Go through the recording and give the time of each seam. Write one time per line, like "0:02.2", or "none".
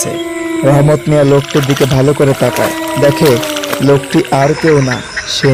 none